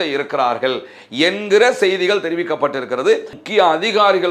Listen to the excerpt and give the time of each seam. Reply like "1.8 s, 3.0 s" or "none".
3.3 s